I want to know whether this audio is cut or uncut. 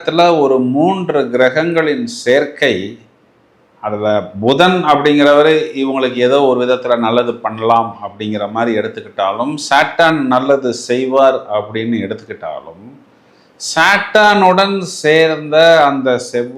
uncut